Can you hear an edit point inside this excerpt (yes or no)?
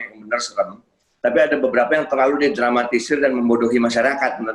no